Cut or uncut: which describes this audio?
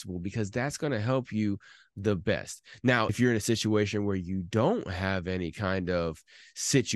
cut